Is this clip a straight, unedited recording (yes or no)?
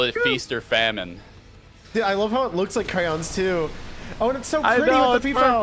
yes